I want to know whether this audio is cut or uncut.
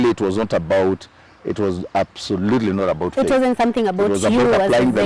uncut